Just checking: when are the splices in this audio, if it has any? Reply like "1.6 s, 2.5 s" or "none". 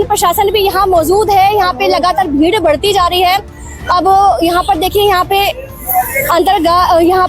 none